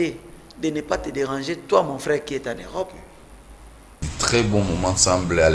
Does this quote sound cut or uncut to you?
cut